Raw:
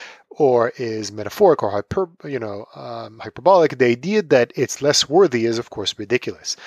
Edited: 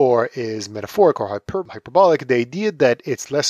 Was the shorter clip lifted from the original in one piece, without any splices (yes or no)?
no